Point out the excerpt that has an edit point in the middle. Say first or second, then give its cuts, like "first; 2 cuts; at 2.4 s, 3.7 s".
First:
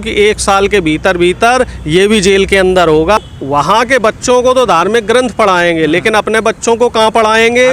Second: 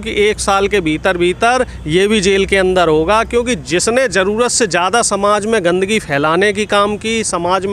first; 1 cut; at 3.2 s